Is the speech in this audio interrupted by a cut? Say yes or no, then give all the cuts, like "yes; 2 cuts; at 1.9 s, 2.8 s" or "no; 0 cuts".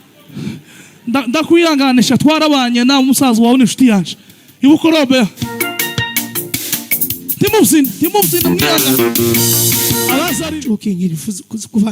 yes; 1 cut; at 10.4 s